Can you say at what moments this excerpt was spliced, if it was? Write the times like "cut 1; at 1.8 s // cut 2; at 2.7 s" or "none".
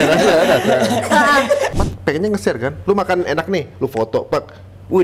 cut 1; at 1.7 s